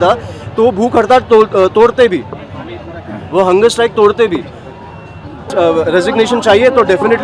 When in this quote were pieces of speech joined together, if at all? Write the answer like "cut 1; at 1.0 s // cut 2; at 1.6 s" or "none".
cut 1; at 5.5 s